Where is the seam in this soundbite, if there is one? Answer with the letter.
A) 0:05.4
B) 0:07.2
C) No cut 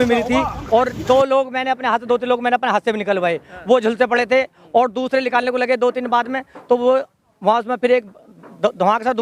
C